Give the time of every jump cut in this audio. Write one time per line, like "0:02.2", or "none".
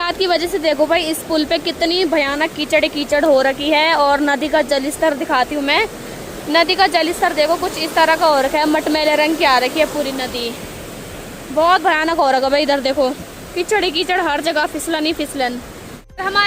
none